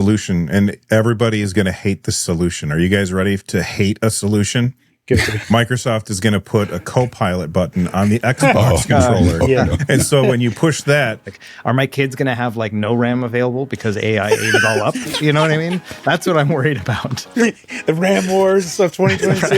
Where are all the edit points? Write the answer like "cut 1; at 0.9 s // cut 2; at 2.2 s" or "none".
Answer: cut 1; at 11.4 s